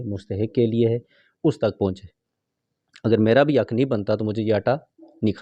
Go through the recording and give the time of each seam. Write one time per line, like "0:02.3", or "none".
none